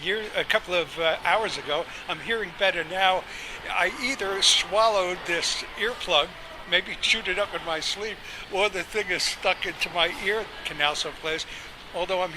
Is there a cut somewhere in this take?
yes; 1 cut; at 10.3 s

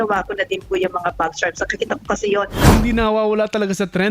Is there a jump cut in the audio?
yes; 1 cut; at 2.6 s

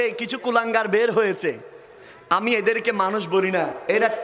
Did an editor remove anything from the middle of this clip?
no; 0 cuts

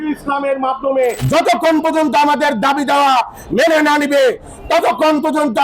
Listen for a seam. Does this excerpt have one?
yes; 1 cut; at 1.2 s

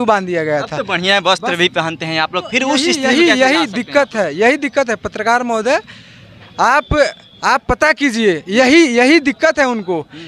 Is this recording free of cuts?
yes; 0 cuts

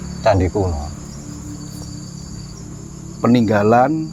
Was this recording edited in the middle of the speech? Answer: no; 0 cuts

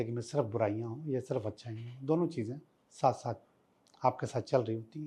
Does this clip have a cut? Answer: no; 0 cuts

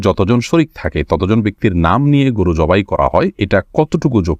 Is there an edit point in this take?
yes; 1 cut; at 3.4 s

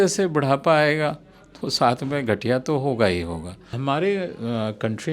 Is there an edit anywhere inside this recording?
yes; 1 cut; at 3.8 s

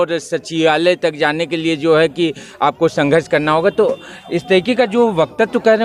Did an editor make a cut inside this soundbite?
no; 0 cuts

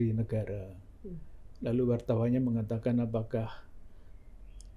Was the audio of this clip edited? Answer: no; 0 cuts

